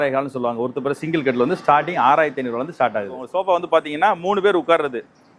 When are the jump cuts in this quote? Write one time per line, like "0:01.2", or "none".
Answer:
0:03.2